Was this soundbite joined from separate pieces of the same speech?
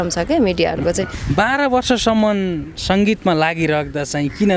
yes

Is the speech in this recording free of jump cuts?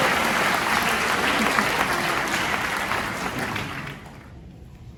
yes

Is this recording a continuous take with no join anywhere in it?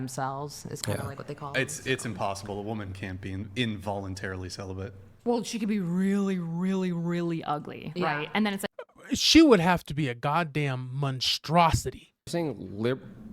no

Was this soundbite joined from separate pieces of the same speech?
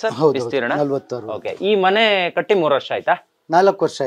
no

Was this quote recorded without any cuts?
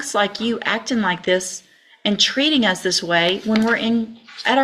yes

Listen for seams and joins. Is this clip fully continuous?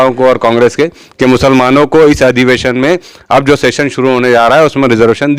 yes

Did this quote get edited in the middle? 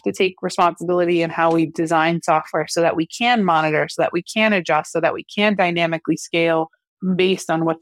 no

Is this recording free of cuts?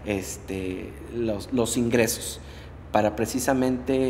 yes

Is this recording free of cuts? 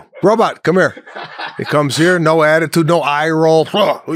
yes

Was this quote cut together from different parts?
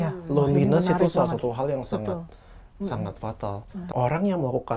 yes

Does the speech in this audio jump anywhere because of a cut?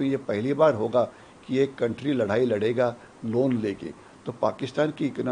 no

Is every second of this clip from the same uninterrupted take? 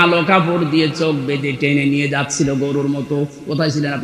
yes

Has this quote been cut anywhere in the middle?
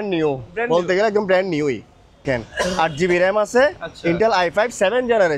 yes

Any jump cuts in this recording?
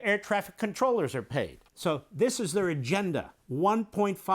yes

